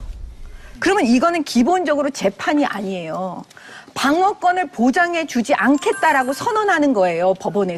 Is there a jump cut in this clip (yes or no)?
yes